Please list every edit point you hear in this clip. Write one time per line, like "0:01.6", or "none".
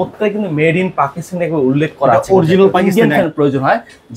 0:02.8